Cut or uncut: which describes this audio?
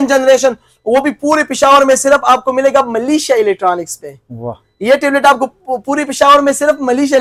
uncut